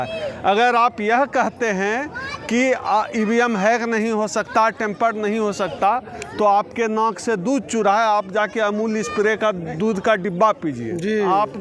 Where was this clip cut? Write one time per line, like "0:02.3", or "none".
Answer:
none